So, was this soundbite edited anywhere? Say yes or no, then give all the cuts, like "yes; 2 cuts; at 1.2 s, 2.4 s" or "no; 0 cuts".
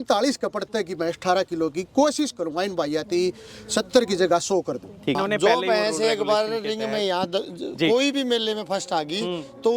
yes; 1 cut; at 5.2 s